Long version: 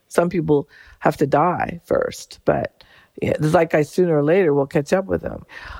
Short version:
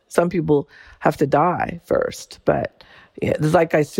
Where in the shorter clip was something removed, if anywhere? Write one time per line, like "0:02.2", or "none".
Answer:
none